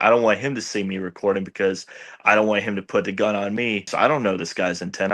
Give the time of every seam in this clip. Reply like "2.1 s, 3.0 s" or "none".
3.9 s